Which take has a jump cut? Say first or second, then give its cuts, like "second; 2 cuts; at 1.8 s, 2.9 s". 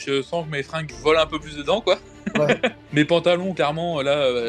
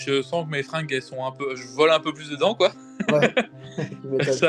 first; 2 cuts; at 0.9 s, 2.8 s